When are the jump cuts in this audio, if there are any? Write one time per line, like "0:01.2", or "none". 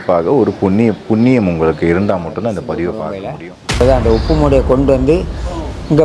0:03.8